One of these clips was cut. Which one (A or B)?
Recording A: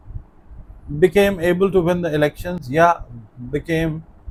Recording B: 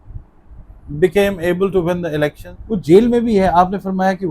B